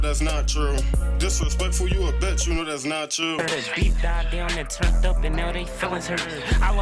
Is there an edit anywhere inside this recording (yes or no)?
yes